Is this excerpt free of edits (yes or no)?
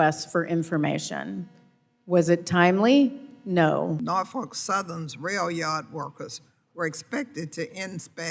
no